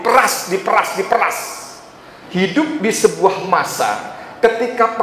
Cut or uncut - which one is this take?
cut